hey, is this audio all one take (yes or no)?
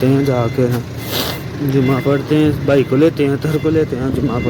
yes